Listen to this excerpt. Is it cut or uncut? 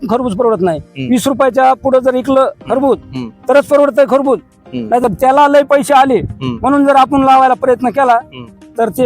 cut